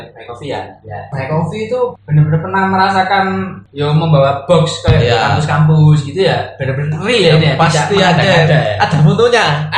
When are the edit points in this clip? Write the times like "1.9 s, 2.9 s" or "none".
1.1 s, 3.6 s

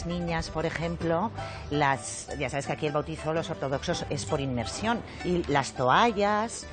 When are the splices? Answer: 5.1 s

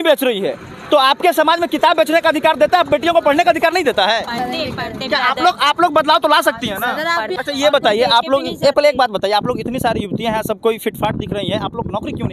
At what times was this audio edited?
7.3 s

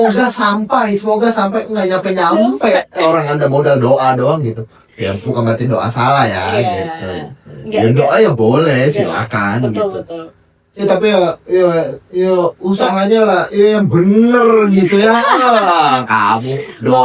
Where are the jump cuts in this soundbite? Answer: none

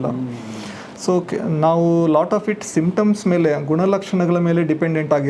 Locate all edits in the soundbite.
none

